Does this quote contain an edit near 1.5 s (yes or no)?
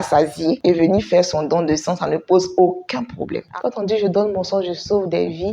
no